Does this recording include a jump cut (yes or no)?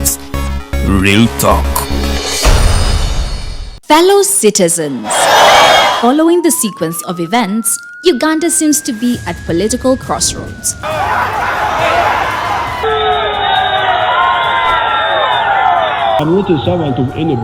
yes